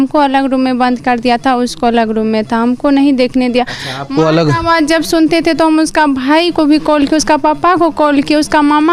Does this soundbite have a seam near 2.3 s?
no; 0 cuts

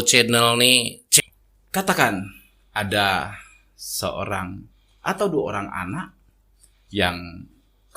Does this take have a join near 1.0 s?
yes; 1 cut; at 1.0 s

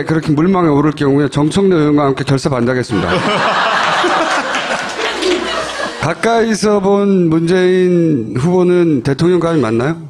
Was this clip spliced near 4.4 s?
no; 1 cut; at 6.5 s

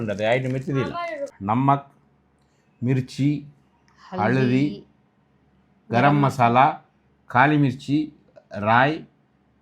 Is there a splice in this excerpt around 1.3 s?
yes; 1 cut; at 1.3 s

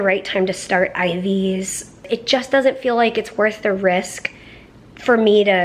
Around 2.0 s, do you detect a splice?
yes; 1 cut; at 2.0 s

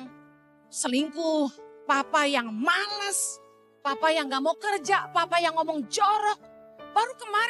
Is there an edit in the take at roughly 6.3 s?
no; 0 cuts

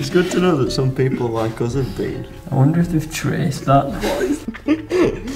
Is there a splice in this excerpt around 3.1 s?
no; 1 cut; at 4.5 s

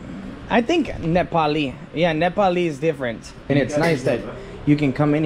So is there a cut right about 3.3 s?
yes; 1 cut; at 3.3 s

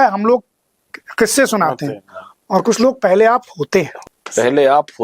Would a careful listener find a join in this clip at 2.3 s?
no; 1 cut; at 4.0 s

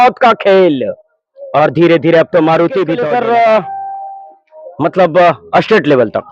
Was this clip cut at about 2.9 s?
yes; 1 cut; at 2.9 s

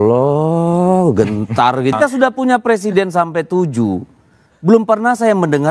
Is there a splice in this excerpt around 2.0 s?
yes; 1 cut; at 2.0 s

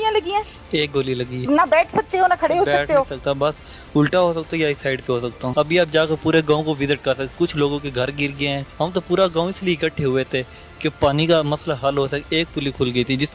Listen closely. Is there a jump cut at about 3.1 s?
no; 3 cuts; at 1.4 s, 5.5 s, 8.7 s

